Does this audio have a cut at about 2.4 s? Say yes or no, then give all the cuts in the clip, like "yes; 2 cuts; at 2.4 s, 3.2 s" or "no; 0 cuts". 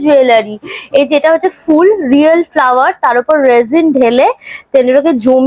no; 0 cuts